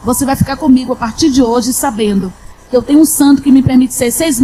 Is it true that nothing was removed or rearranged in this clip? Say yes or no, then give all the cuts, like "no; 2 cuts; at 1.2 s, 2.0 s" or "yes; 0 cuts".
yes; 0 cuts